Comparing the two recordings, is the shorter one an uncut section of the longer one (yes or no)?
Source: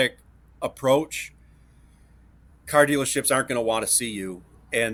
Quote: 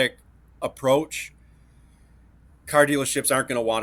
yes